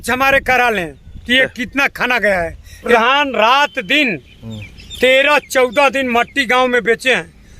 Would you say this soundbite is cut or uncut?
cut